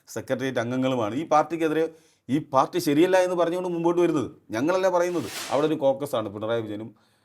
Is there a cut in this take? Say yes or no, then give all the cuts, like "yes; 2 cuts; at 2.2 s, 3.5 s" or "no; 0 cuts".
yes; 1 cut; at 5.4 s